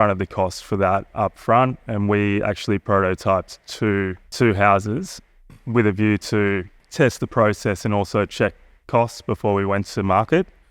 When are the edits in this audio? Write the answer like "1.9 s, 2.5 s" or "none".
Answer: 4.3 s, 6.8 s